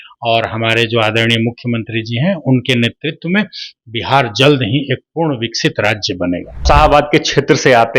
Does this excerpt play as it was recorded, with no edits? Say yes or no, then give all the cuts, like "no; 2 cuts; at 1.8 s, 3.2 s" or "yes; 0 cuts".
no; 1 cut; at 6.6 s